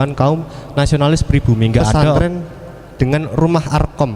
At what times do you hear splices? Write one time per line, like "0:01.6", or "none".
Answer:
0:02.2